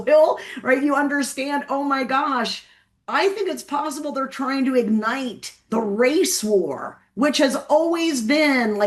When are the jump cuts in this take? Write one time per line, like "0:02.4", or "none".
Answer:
none